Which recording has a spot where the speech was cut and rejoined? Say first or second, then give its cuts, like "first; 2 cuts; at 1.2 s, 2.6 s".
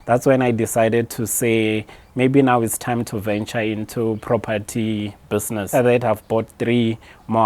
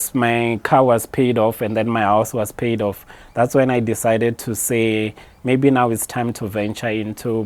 first; 1 cut; at 5.7 s